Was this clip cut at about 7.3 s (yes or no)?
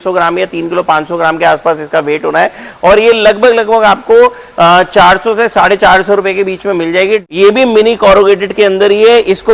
yes